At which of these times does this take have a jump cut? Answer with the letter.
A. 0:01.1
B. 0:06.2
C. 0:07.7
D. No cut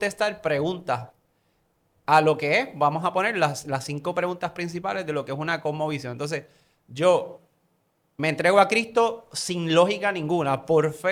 D